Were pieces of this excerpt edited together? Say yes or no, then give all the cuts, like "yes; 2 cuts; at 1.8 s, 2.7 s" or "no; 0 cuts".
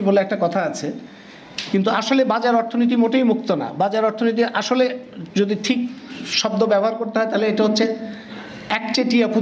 no; 0 cuts